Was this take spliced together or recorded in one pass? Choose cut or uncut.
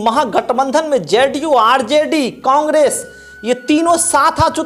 uncut